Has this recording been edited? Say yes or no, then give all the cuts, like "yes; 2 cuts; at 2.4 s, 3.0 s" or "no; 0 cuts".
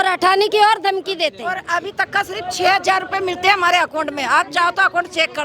no; 0 cuts